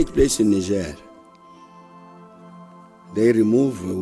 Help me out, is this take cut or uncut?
uncut